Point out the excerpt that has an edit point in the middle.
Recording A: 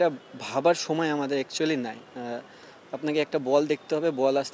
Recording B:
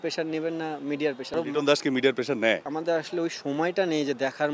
B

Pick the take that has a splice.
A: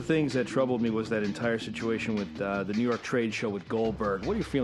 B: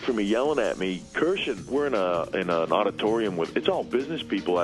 B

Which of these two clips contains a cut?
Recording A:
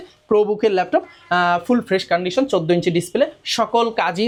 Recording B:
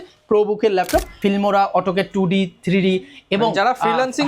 B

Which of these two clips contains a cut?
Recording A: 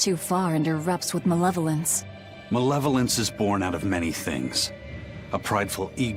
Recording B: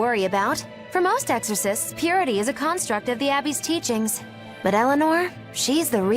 B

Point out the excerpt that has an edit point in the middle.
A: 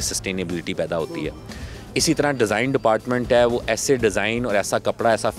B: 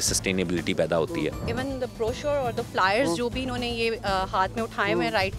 B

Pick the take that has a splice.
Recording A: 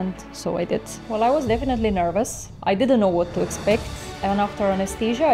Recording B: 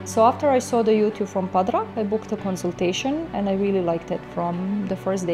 A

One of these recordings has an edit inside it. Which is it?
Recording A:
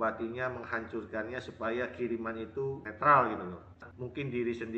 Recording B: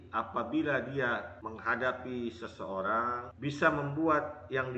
A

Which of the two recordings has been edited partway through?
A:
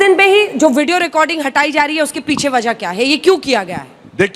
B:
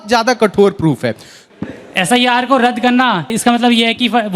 B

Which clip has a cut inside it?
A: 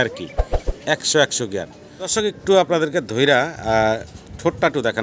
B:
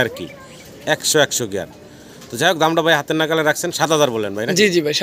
A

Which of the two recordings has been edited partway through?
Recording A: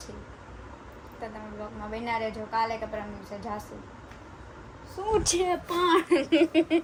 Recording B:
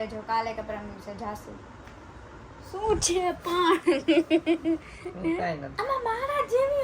B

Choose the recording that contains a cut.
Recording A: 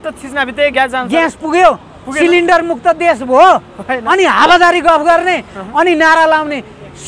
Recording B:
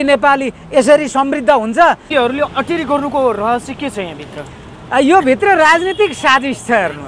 B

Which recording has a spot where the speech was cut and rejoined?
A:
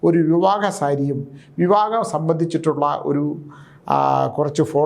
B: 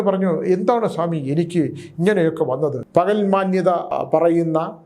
B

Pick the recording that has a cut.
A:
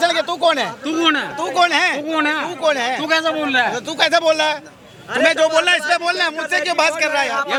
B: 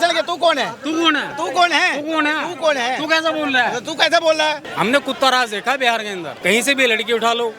B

